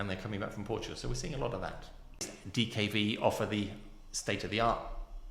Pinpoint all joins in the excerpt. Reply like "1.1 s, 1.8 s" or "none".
2.4 s